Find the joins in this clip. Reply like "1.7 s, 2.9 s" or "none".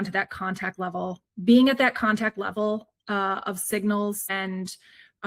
4.3 s